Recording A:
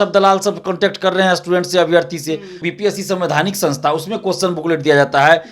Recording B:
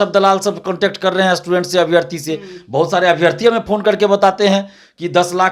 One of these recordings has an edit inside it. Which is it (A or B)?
A